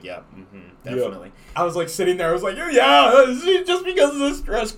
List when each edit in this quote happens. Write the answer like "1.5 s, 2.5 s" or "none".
1.4 s

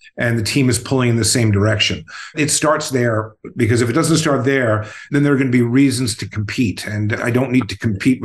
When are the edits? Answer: 2.3 s, 7.2 s

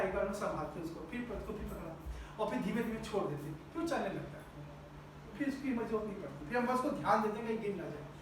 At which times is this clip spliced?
none

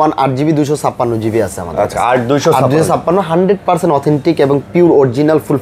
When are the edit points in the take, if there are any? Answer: none

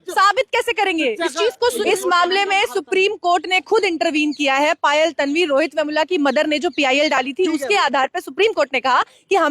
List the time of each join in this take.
1.8 s

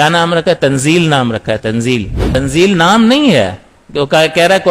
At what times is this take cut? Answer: 2.2 s

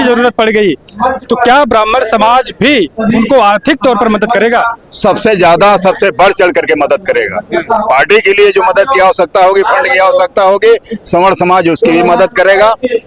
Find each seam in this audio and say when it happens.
none

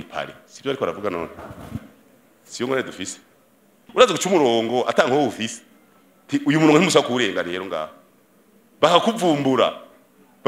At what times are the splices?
3.8 s

